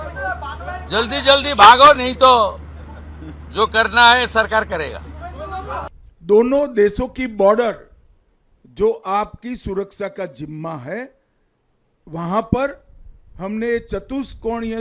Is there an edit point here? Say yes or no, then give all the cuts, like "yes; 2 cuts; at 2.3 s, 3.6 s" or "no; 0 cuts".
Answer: yes; 1 cut; at 6.1 s